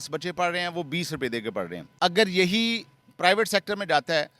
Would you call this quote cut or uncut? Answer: uncut